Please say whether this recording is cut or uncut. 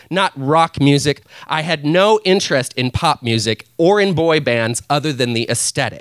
cut